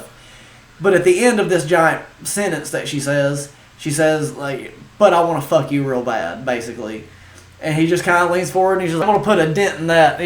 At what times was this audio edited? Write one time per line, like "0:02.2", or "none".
0:09.0